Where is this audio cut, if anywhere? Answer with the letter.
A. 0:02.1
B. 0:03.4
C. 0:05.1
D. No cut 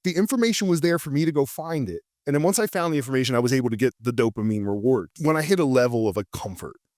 C